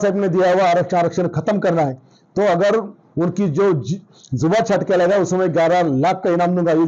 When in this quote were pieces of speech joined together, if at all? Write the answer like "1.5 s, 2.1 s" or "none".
none